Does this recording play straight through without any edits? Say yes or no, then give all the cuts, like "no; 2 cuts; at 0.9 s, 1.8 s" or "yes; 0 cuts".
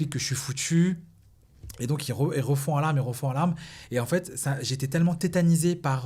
yes; 0 cuts